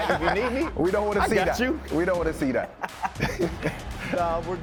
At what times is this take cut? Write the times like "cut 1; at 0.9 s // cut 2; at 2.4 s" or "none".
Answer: none